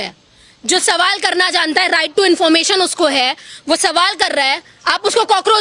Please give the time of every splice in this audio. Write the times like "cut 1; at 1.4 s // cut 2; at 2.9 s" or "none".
none